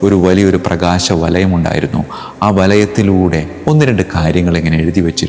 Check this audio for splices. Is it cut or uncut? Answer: uncut